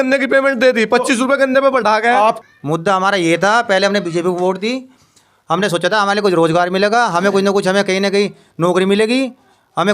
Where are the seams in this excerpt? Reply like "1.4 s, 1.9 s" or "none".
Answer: 2.4 s

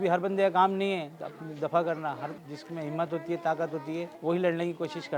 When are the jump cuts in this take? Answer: 2.4 s, 4.1 s

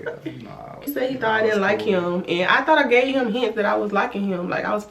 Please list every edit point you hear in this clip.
0.9 s

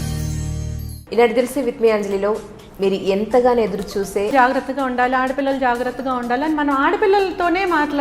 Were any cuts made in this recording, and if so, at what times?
1.0 s, 4.3 s

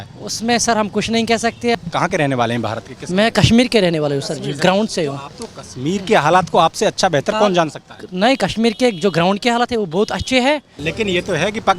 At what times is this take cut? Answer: 1.7 s, 10.8 s

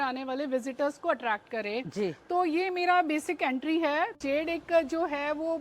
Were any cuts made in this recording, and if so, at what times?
4.2 s

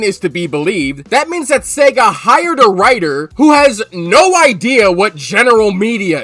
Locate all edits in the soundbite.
none

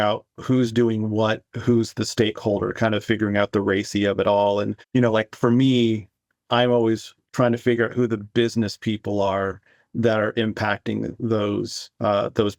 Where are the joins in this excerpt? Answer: none

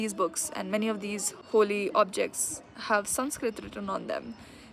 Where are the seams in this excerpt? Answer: 1.3 s

